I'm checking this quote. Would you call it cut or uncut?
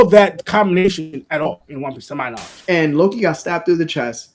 cut